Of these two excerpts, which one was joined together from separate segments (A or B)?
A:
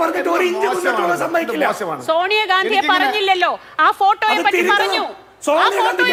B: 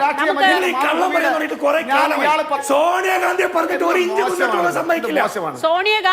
B